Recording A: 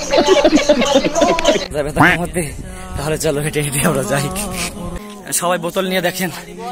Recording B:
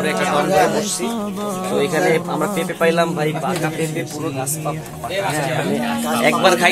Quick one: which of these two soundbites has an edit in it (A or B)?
A